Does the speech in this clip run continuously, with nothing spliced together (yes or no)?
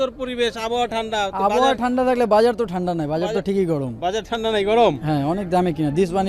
yes